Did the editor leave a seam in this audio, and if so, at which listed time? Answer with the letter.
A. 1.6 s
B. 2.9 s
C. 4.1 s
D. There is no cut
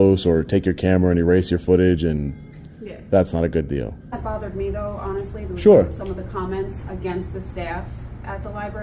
C